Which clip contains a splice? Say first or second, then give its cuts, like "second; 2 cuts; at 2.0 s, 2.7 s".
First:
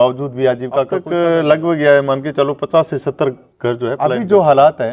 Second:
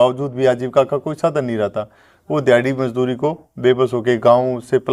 first; 2 cuts; at 1.0 s, 4.0 s